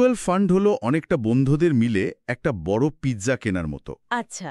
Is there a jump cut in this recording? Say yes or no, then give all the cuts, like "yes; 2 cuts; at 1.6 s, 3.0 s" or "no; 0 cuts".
no; 0 cuts